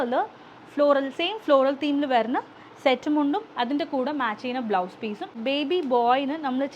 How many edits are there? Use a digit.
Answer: 1